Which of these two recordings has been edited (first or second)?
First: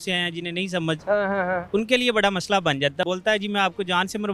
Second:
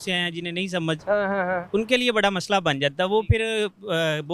first